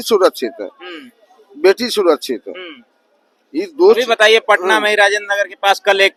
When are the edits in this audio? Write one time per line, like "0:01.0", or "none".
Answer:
none